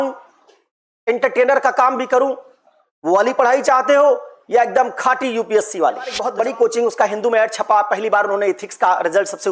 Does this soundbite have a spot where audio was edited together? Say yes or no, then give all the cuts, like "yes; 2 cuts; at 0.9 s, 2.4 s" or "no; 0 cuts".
yes; 1 cut; at 6.2 s